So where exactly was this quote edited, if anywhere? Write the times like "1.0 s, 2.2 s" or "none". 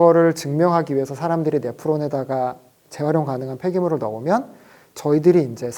none